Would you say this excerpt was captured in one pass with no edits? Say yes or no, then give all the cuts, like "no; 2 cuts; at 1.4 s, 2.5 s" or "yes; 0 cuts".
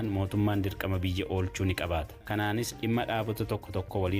no; 1 cut; at 2.2 s